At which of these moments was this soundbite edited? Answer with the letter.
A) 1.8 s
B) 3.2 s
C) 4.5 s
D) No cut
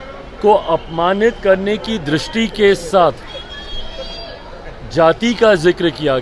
D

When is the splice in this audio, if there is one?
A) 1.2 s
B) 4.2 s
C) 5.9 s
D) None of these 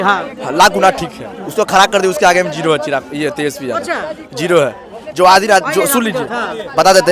D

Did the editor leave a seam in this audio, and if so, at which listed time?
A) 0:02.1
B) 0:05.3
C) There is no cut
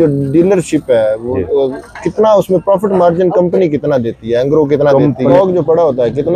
B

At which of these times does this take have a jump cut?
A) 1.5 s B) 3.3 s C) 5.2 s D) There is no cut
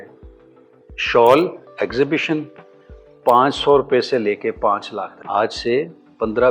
C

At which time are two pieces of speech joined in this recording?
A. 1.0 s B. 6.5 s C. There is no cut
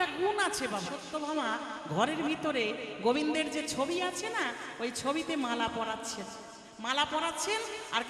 A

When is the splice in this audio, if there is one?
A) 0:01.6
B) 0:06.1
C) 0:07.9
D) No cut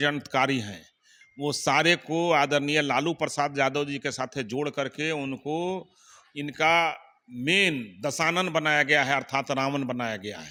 D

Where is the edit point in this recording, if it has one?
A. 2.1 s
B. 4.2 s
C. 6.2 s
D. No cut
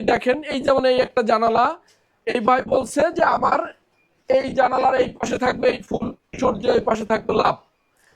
C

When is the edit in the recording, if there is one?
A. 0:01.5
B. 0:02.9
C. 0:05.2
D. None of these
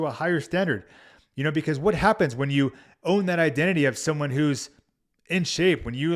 D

